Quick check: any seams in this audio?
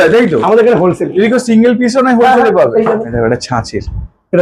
yes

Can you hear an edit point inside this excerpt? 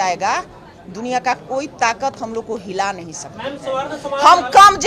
no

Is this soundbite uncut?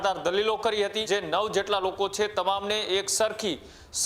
no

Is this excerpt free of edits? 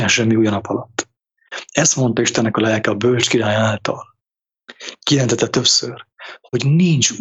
yes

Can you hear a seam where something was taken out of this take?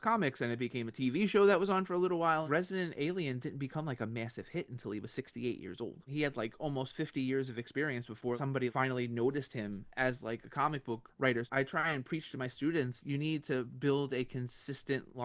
yes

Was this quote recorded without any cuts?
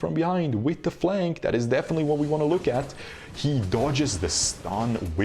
yes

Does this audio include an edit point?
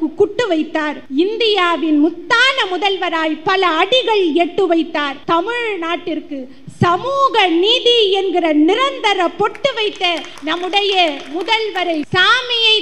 yes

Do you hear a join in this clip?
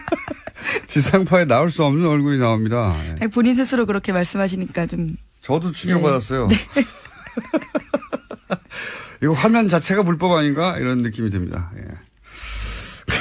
no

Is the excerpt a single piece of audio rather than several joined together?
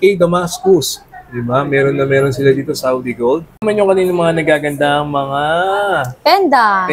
no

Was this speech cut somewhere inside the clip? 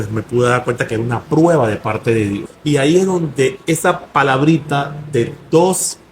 yes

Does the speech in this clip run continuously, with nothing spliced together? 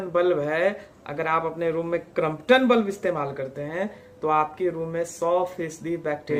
yes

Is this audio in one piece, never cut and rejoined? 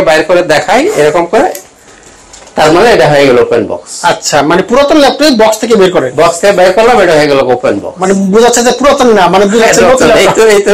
yes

